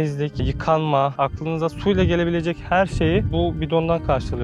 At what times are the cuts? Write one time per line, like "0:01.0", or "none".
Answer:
0:01.1
0:03.3